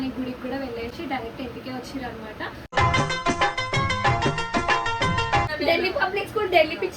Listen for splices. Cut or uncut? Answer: cut